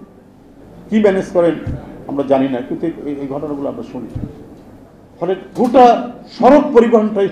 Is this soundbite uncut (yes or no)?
yes